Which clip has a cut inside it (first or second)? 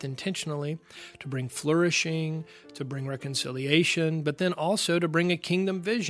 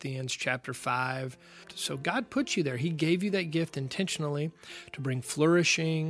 second